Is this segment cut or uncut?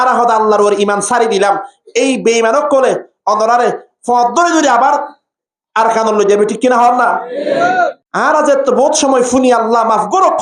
cut